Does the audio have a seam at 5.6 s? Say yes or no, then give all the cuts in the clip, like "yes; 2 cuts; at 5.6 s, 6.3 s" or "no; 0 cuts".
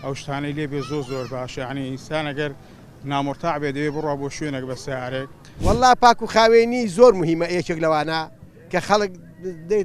yes; 1 cut; at 5.6 s